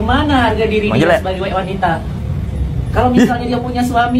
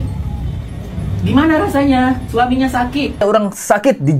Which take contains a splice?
second; 1 cut; at 3.2 s

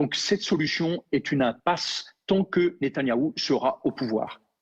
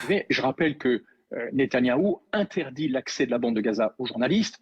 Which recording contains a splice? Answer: second; 1 cut; at 2.5 s

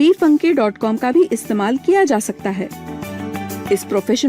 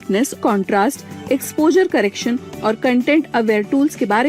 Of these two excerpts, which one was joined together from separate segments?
first; 1 cut; at 3.0 s

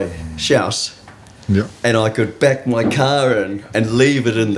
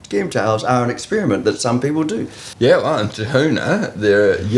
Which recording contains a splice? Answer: second; 1 cut; at 2.5 s

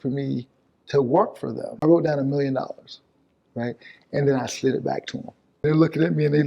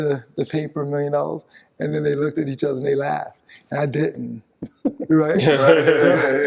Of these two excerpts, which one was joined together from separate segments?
first; 2 cuts; at 1.8 s, 5.5 s

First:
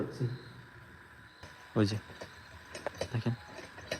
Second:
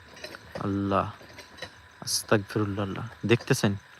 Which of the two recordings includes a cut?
first; 1 cut; at 1.6 s

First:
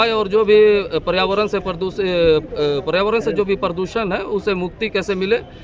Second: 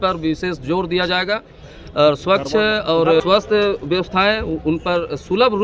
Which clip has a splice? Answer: second; 1 cut; at 3.2 s

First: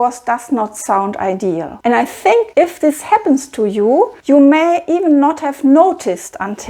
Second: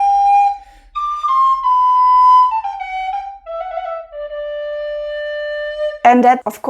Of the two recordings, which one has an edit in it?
first; 3 cuts; at 1.7 s, 2.5 s, 4.2 s

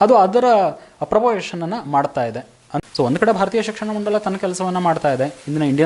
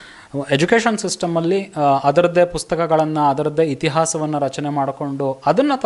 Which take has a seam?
first; 1 cut; at 2.7 s

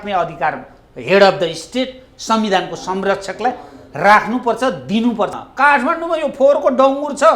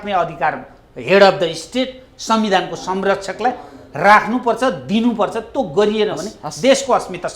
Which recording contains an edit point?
first; 1 cut; at 5.4 s

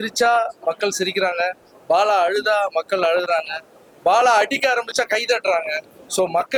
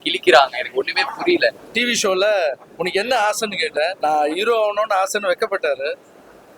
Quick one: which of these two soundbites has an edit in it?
second; 2 cuts; at 1.6 s, 3.9 s

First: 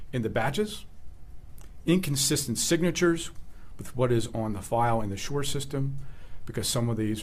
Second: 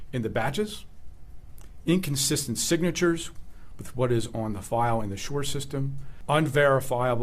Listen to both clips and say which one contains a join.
second; 1 cut; at 6.1 s

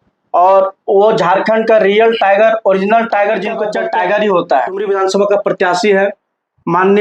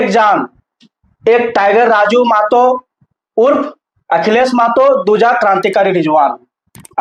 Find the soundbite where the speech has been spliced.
first; 2 cuts; at 3.7 s, 4.8 s

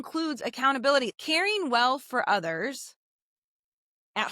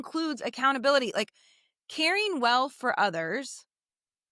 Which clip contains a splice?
first; 1 cut; at 1.1 s

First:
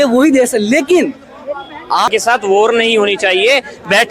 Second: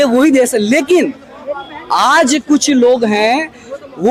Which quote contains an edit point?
first; 1 cut; at 2.1 s

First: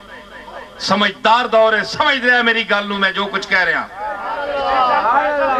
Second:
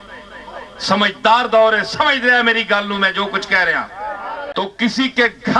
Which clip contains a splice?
second; 1 cut; at 4.4 s

